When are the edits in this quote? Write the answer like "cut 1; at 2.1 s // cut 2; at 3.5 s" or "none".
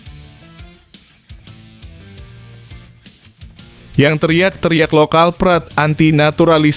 cut 1; at 3.9 s

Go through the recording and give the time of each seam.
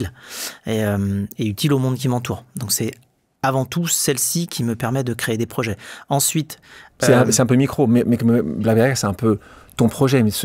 none

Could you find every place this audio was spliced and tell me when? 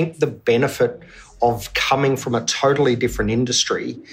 none

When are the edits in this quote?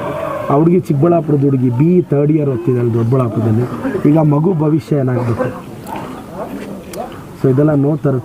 none

